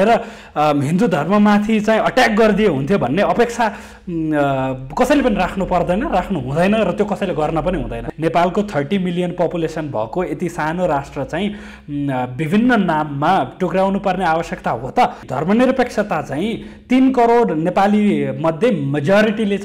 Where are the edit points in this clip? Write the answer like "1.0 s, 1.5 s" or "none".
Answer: 8.0 s, 15.3 s